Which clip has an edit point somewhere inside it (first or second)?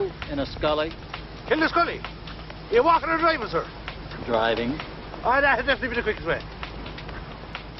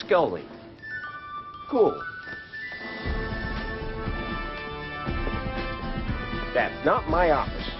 first